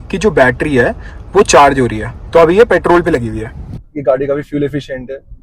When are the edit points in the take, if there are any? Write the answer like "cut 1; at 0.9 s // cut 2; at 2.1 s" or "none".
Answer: cut 1; at 3.7 s